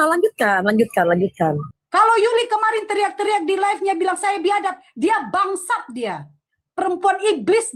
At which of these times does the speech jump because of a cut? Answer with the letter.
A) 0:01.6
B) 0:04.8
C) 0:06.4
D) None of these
A